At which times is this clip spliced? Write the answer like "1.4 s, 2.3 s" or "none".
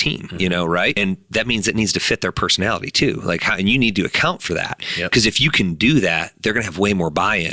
0.9 s

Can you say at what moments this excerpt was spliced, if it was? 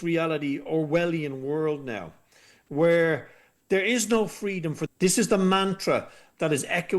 4.9 s

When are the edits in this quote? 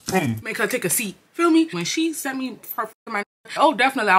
1.7 s

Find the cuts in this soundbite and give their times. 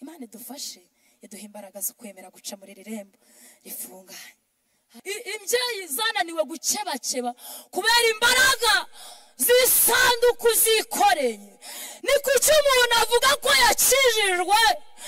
4.9 s

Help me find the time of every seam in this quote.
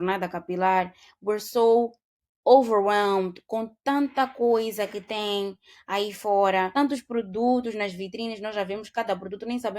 6.7 s

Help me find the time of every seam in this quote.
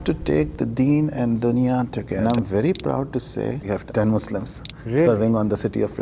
2.1 s, 3.6 s

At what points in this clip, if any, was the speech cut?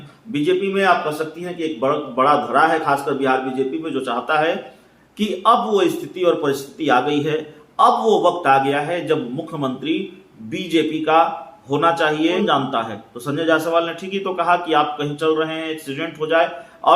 12.4 s

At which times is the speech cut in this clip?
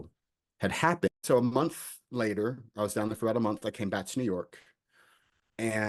1.1 s

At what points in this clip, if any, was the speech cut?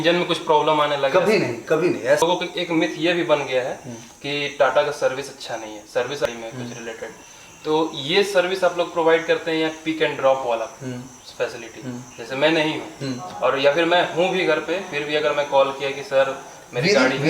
2.2 s, 6.2 s

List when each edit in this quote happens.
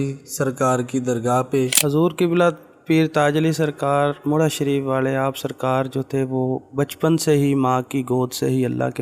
1.8 s

